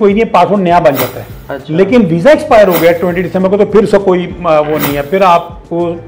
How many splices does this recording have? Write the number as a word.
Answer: zero